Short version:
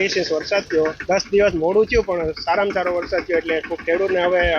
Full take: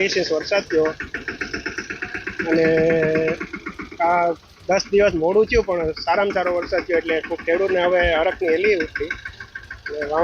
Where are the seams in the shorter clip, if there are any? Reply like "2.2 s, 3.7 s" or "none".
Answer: 1.0 s